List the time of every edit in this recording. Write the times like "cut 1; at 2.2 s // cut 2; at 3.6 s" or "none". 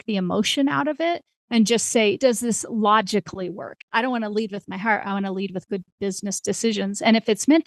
cut 1; at 2.2 s // cut 2; at 3.8 s